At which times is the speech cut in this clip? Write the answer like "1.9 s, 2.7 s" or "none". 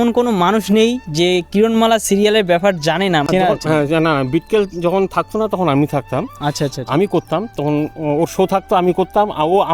none